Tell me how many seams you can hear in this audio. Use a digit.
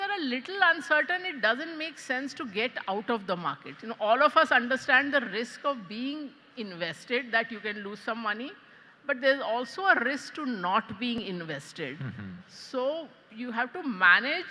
0